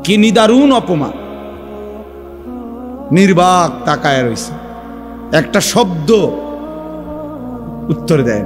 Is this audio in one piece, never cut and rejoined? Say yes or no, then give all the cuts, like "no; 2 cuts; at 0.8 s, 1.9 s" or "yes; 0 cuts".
no; 2 cuts; at 1.1 s, 3.1 s